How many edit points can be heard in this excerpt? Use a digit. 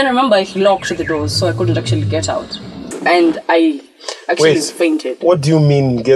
1